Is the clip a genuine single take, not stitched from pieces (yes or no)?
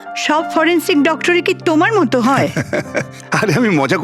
no